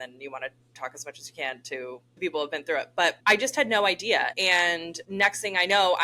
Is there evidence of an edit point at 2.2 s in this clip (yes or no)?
yes